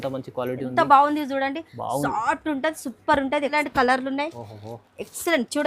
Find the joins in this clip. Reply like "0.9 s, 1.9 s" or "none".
3.5 s